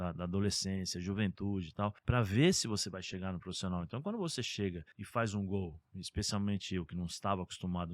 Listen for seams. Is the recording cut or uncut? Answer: cut